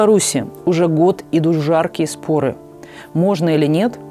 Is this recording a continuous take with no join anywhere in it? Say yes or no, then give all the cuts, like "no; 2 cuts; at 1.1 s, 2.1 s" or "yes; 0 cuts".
yes; 0 cuts